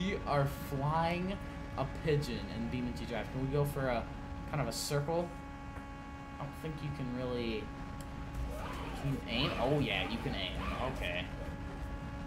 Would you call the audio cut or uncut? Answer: uncut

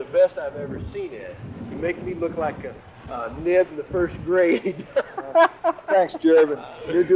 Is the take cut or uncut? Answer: uncut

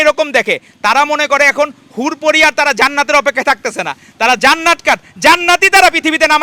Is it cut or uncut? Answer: uncut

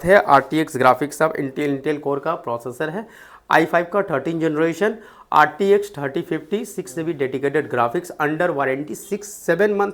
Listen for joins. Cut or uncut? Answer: uncut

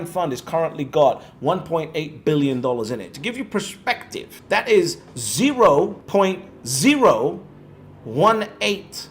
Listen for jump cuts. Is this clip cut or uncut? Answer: cut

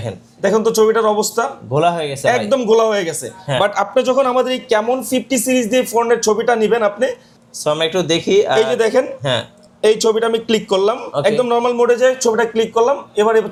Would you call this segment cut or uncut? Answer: uncut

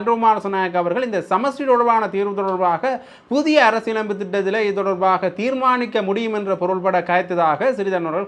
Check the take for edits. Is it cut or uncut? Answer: uncut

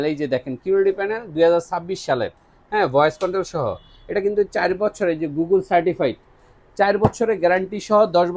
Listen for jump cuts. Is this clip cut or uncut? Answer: uncut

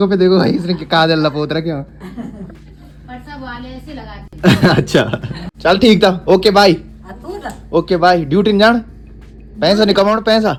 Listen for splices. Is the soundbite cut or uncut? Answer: uncut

